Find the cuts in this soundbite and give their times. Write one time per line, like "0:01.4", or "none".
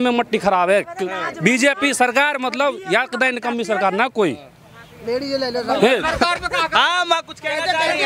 none